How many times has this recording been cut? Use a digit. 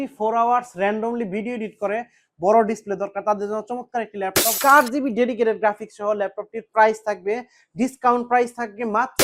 1